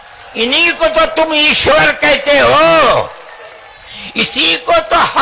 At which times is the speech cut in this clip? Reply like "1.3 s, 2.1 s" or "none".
none